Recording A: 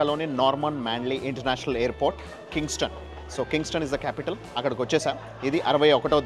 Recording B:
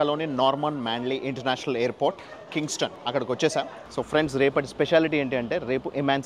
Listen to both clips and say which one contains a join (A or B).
B